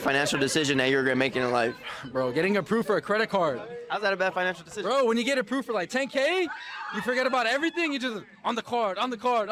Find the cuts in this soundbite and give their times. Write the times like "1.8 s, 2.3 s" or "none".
none